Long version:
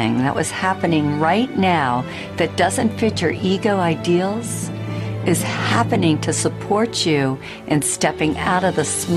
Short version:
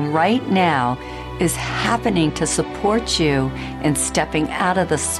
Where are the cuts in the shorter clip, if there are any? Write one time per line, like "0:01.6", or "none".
0:01.1